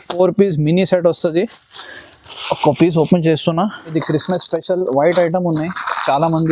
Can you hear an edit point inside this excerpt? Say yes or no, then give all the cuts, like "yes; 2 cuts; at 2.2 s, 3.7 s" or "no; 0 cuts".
yes; 1 cut; at 3.9 s